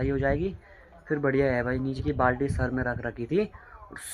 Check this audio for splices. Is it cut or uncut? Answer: cut